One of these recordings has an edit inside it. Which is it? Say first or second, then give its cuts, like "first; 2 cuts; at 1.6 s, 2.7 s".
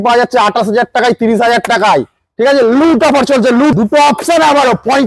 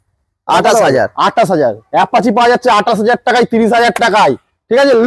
first; 1 cut; at 3.7 s